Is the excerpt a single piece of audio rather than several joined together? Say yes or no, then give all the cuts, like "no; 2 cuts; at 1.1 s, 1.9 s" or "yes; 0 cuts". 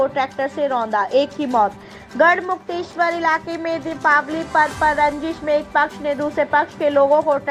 yes; 0 cuts